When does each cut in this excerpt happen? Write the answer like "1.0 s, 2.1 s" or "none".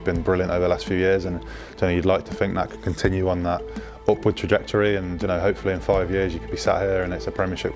none

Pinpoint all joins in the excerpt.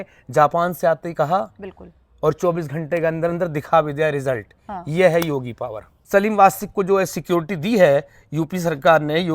5.9 s

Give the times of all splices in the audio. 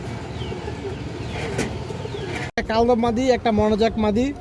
2.5 s

